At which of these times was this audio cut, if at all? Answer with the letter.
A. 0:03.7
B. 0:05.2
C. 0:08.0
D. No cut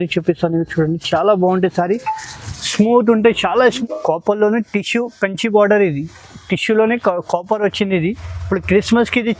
A